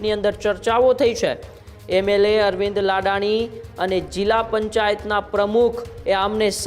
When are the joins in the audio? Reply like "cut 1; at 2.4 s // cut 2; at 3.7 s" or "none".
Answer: none